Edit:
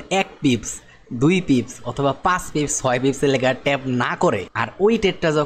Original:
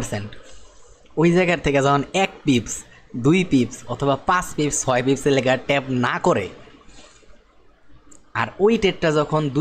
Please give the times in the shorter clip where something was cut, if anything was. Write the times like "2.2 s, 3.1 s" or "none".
4.6 s